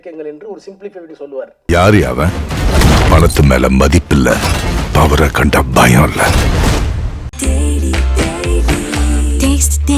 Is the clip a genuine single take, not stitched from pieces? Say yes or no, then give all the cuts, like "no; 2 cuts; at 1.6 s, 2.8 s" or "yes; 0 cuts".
no; 1 cut; at 1.6 s